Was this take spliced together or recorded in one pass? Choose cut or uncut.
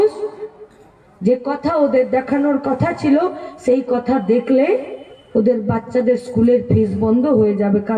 uncut